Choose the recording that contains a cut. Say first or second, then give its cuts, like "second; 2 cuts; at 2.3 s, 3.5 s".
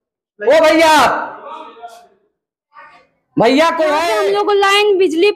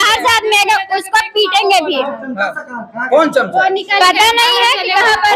first; 1 cut; at 4.1 s